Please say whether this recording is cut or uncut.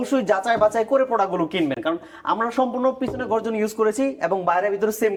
uncut